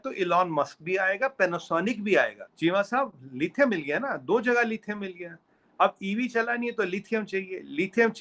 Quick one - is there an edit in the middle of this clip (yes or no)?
yes